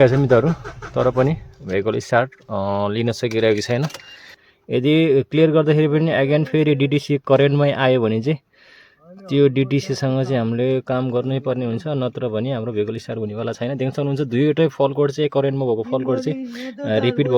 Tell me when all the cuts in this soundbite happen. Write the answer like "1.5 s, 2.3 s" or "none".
4.4 s